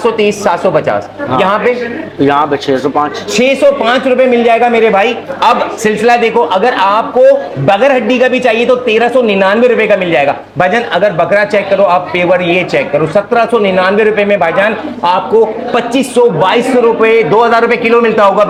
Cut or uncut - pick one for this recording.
uncut